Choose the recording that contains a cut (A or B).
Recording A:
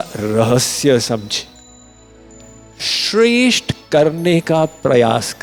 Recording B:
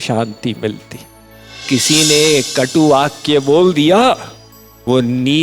B